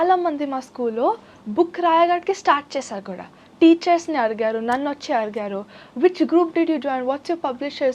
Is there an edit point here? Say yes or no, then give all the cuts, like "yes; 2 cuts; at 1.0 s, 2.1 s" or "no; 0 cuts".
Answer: no; 0 cuts